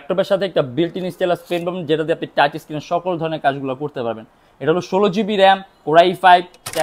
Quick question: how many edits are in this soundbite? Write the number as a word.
zero